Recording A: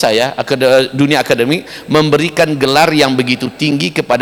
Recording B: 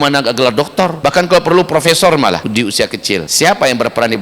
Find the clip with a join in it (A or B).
B